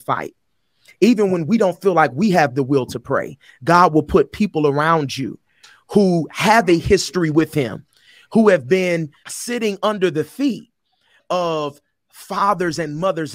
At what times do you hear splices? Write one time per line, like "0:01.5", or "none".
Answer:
0:09.2
0:11.2